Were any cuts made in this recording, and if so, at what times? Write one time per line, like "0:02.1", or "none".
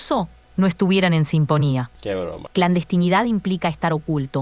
0:02.4

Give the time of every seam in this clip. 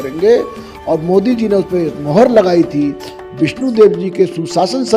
none

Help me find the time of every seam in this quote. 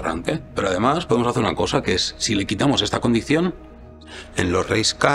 0:03.9

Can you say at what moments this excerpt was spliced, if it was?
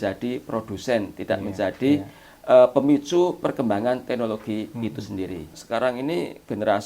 0:05.6

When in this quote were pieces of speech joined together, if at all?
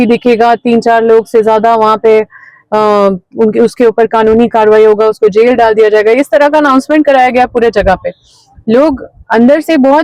none

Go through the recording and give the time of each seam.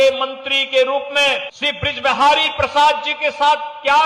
0:01.5

